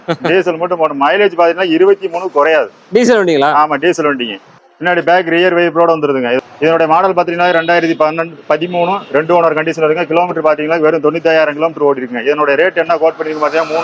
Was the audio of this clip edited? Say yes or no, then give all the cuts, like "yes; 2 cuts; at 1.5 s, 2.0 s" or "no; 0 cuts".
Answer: no; 0 cuts